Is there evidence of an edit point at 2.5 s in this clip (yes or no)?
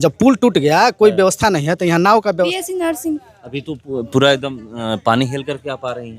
yes